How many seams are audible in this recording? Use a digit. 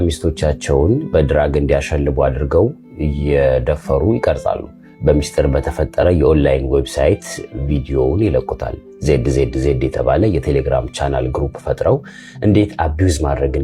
0